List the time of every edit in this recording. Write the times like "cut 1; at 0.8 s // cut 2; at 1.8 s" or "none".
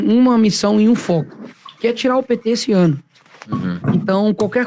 none